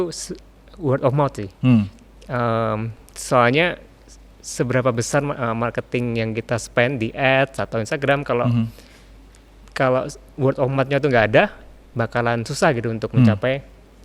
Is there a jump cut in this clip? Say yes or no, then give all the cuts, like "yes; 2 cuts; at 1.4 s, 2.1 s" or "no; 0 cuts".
no; 0 cuts